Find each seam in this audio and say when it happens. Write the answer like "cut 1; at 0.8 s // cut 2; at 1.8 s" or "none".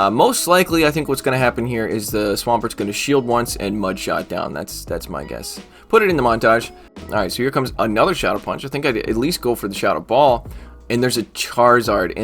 cut 1; at 7.0 s